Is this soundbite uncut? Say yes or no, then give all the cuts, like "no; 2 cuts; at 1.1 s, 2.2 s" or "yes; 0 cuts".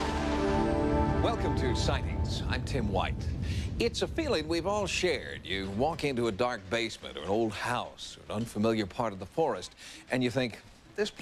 no; 1 cut; at 4.6 s